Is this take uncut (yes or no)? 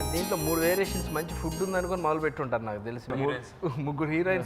no